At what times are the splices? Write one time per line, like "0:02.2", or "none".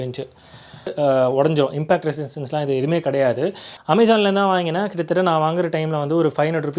0:00.9
0:03.7